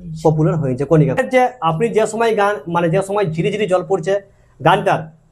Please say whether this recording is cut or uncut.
cut